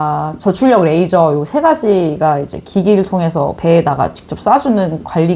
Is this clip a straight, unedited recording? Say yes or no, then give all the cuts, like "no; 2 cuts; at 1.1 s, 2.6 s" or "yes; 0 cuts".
yes; 0 cuts